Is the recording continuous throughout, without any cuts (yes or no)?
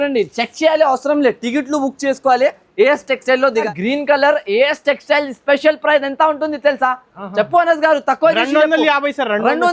no